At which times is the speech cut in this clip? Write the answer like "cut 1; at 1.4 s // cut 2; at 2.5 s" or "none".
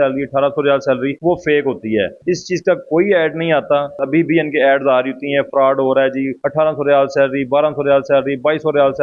cut 1; at 4.0 s